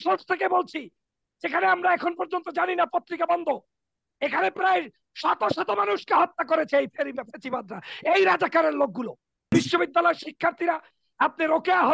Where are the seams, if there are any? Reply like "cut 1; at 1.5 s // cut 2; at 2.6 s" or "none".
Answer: cut 1; at 9.5 s